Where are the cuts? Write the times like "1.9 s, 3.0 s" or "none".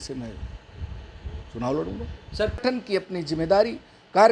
2.6 s